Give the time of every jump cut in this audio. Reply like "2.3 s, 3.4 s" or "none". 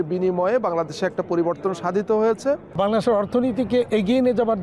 2.7 s